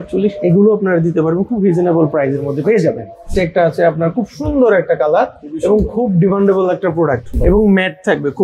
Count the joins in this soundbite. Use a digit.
2